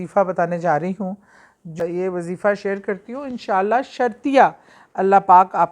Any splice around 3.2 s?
no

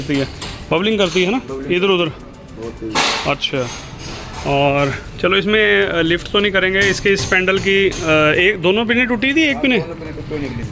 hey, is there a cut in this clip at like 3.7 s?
no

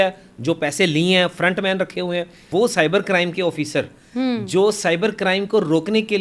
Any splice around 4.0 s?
no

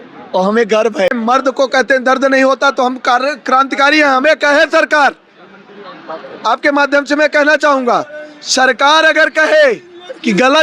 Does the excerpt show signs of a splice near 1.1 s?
yes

